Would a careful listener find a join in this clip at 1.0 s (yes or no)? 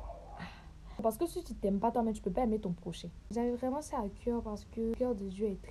yes